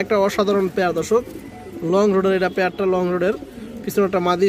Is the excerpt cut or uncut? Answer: uncut